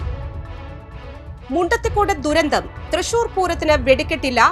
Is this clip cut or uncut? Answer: cut